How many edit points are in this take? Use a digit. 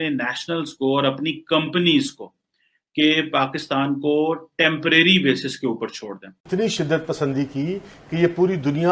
1